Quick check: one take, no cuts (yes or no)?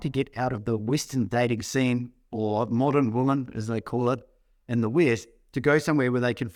yes